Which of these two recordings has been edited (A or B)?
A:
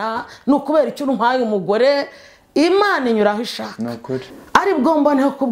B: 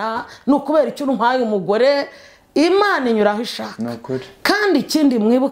A